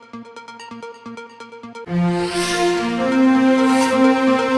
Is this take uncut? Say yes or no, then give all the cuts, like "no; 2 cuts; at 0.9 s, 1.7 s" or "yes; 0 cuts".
no; 1 cut; at 1.5 s